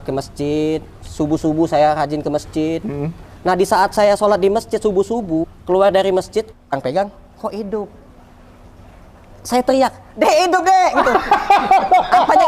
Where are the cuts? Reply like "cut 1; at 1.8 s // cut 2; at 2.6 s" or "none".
cut 1; at 5.5 s // cut 2; at 6.7 s